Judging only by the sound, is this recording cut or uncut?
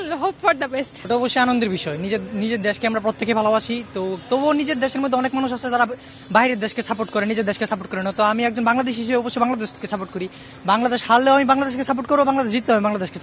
uncut